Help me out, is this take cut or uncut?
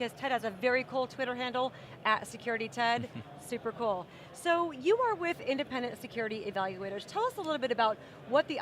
cut